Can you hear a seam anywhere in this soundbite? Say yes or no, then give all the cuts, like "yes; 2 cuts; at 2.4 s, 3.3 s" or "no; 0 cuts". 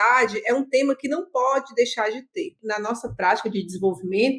yes; 1 cut; at 2.6 s